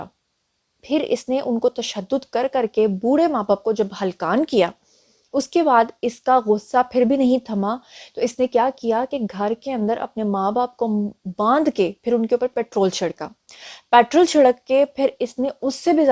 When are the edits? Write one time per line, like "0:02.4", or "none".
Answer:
none